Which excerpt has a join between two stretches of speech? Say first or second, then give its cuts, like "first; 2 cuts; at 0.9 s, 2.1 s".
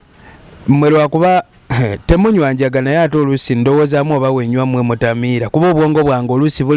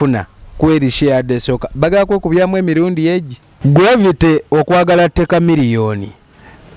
second; 1 cut; at 3.5 s